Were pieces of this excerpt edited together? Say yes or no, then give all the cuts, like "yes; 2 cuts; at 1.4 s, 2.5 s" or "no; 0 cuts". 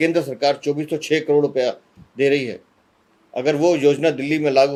no; 0 cuts